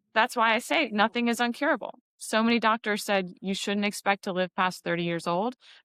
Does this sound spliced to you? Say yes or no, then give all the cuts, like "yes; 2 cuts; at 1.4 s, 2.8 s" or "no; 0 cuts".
no; 0 cuts